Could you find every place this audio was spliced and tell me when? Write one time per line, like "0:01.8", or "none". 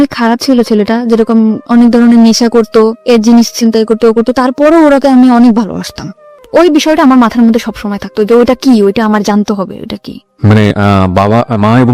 0:06.4